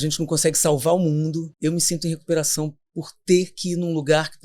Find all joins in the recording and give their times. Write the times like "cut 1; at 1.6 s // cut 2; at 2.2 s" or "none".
cut 1; at 1.5 s